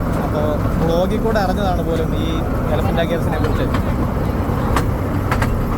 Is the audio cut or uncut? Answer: uncut